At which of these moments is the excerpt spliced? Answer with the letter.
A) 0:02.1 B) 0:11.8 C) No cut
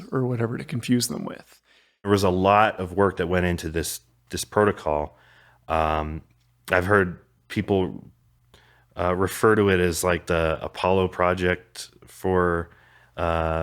A